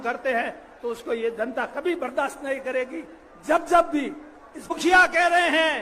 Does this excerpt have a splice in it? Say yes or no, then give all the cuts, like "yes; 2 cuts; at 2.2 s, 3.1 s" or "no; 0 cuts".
yes; 1 cut; at 4.7 s